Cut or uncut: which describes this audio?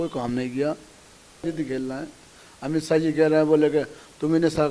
cut